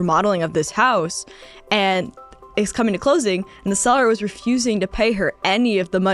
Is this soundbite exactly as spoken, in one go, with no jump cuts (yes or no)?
yes